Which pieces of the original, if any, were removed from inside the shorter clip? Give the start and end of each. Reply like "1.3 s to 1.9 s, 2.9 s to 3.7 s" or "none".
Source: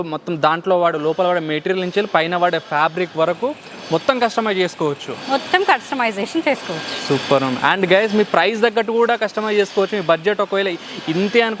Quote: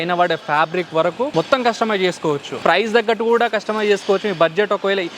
3.5 s to 3.9 s, 5.2 s to 8.3 s